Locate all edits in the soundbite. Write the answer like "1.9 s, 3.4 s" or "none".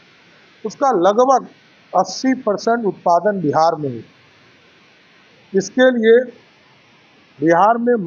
none